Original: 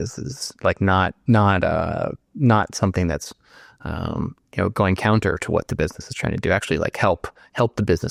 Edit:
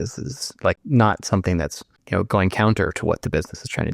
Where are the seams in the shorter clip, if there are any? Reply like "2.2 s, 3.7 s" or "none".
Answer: 0.8 s, 1.9 s

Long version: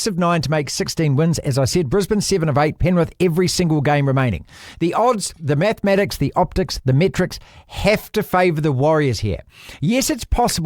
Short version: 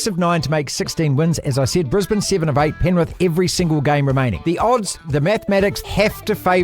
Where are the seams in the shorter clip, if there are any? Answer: 4.4 s, 5.8 s

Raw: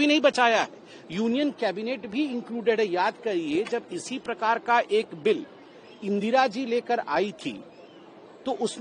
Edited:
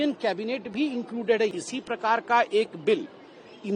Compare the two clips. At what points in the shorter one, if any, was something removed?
1.5 s

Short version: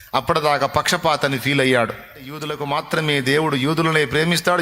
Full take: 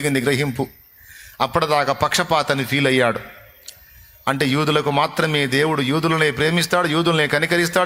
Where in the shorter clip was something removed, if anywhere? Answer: 2.5 s

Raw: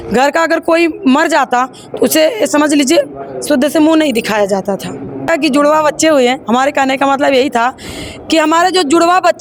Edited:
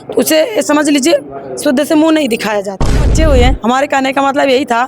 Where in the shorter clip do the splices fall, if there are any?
3.1 s

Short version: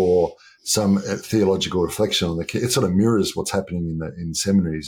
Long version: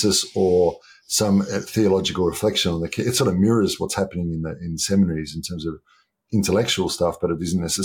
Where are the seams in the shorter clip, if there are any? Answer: none

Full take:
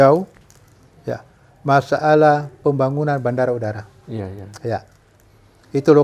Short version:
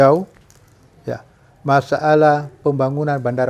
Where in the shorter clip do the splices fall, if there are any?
none

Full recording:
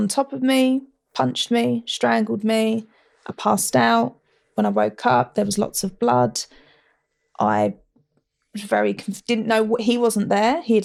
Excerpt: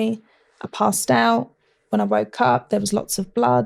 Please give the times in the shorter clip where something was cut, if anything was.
none

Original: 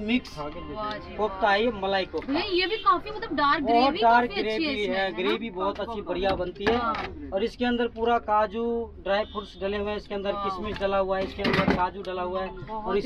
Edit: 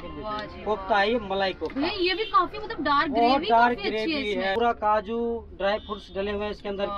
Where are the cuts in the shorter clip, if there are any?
4.5 s

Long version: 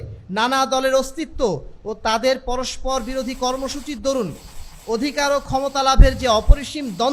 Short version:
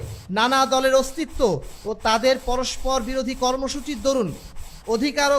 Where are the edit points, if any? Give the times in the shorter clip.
none

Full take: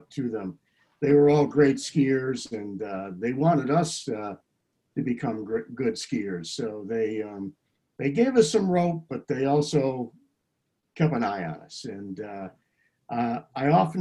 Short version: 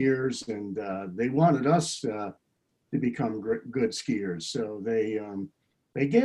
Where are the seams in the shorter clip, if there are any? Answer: none

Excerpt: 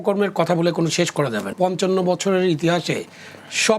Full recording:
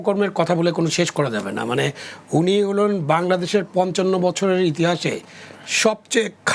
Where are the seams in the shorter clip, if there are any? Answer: 1.5 s

